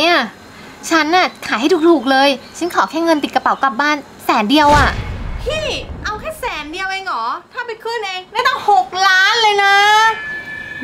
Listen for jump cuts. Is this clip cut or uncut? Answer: uncut